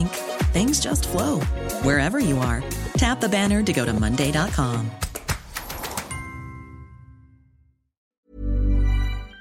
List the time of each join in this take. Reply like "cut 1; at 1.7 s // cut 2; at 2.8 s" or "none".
cut 1; at 8.2 s